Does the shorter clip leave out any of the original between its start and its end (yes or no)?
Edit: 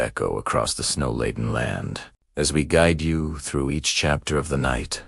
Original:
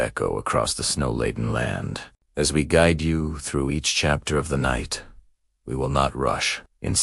no